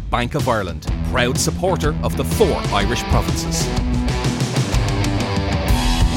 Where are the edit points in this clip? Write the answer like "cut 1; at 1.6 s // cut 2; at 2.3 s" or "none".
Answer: none